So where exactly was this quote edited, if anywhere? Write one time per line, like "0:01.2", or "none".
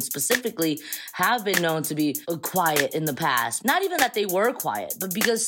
0:02.2
0:03.5